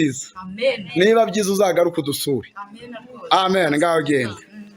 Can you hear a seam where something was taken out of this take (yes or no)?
no